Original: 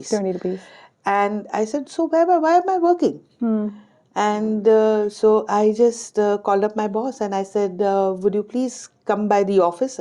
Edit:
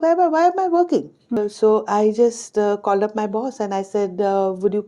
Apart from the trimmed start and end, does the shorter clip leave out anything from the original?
yes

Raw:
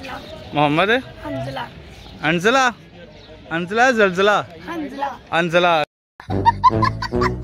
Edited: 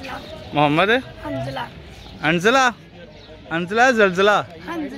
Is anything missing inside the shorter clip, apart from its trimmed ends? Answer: no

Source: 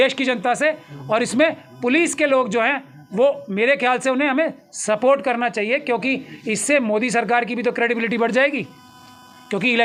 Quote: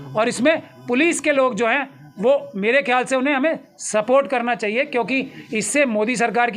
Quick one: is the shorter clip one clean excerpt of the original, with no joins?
yes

